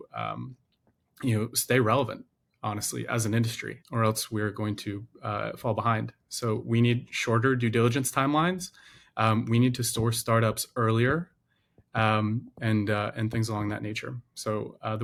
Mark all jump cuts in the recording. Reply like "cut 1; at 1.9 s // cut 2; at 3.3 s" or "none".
none